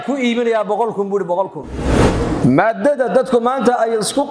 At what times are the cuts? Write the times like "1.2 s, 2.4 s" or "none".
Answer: 1.9 s

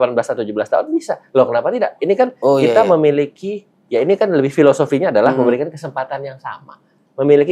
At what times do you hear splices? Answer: none

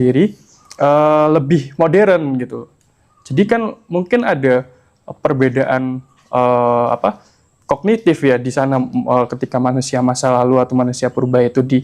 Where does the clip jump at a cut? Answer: none

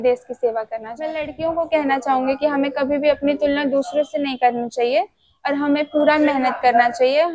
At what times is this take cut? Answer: 1.3 s

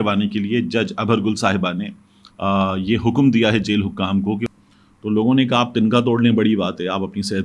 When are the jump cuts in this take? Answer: 4.5 s

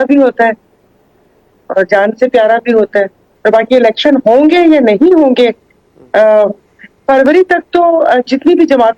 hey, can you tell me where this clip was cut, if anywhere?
3.2 s

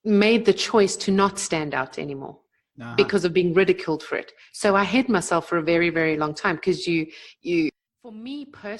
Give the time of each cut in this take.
7.8 s

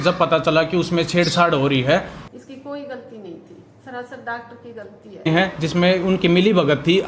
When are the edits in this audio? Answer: 2.2 s, 5.3 s

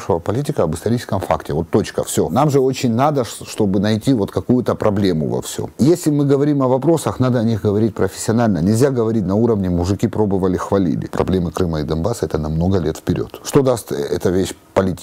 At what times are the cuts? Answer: 2.3 s, 5.7 s, 11.1 s, 13.4 s

